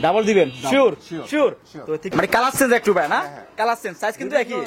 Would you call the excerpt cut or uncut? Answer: cut